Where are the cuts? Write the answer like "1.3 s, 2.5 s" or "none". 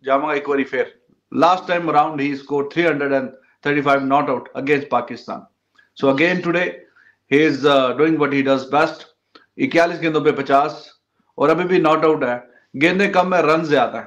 none